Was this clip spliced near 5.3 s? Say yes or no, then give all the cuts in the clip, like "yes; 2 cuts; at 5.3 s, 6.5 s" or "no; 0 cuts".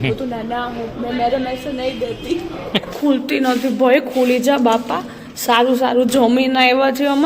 no; 1 cut; at 2.9 s